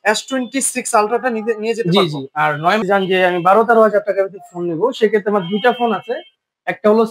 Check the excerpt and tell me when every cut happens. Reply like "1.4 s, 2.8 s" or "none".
2.8 s